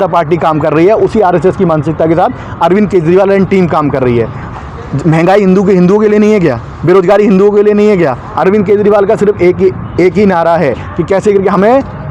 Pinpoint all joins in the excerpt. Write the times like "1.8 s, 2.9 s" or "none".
4.4 s, 8.2 s, 10.9 s